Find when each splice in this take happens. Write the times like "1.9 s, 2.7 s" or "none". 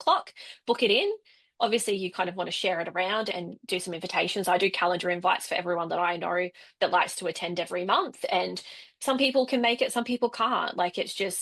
3.3 s